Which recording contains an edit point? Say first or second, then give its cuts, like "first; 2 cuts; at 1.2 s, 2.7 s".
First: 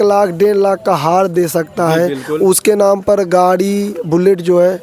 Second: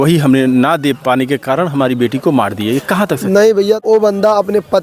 second; 1 cut; at 3.8 s